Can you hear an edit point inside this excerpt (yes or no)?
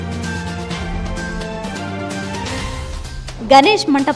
yes